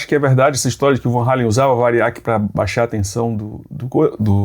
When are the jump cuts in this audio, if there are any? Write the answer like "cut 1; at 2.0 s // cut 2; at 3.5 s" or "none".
none